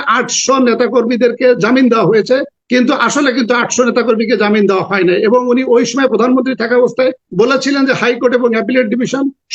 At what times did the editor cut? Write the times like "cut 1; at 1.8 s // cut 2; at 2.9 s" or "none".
cut 1; at 2.6 s // cut 2; at 7.2 s